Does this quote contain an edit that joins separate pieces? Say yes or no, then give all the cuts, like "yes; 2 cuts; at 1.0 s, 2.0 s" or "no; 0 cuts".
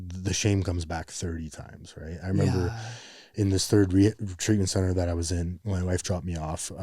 yes; 1 cut; at 5.6 s